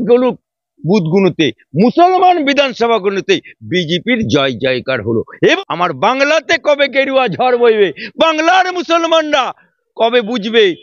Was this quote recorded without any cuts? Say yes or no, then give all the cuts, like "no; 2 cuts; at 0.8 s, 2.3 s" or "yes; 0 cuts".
no; 1 cut; at 5.3 s